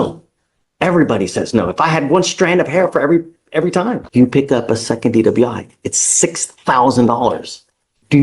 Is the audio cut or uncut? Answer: cut